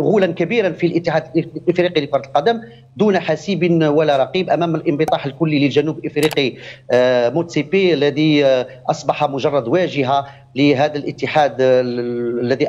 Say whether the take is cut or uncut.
uncut